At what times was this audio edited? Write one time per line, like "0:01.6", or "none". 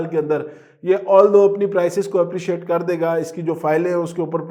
none

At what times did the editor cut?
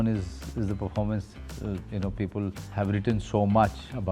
0:02.6

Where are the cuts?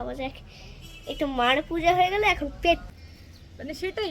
0:02.8

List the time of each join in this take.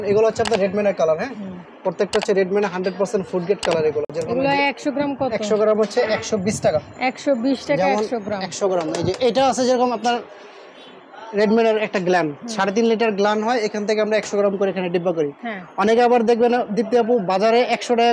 none

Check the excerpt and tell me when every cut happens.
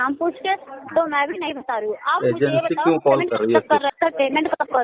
0:03.9

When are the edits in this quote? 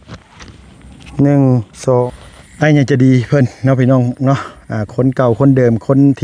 0:02.1

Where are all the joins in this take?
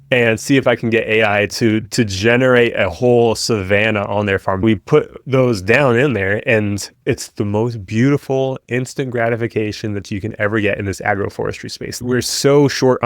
0:04.6
0:07.0
0:12.0

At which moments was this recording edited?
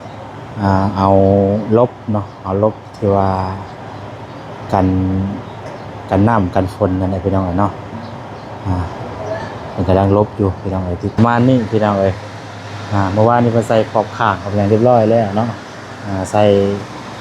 0:11.2

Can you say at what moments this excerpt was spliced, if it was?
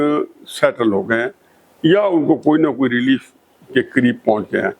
none

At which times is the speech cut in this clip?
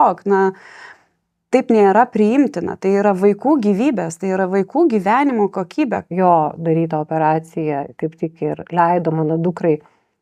0:06.1

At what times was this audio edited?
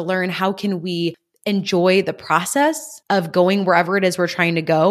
0:02.9

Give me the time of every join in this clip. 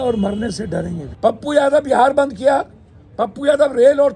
0:01.0

